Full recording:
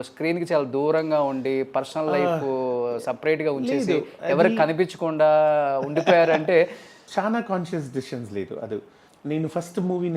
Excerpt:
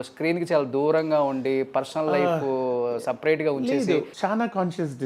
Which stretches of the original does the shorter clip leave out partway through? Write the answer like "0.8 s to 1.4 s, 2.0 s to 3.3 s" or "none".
4.1 s to 7.1 s